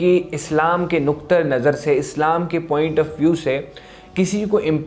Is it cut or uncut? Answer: uncut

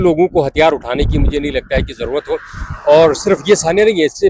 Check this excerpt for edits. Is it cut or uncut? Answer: uncut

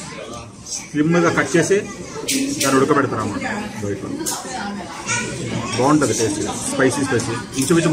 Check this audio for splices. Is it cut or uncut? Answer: uncut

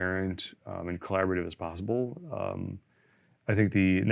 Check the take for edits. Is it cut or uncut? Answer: uncut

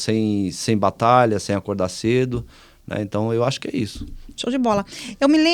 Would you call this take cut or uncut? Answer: uncut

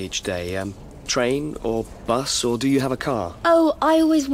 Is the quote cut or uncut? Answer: uncut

